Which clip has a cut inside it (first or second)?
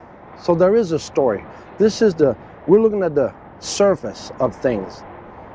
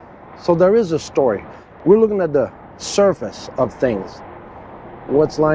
second